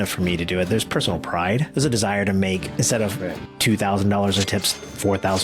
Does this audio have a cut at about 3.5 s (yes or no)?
no